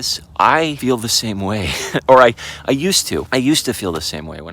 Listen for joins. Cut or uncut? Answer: cut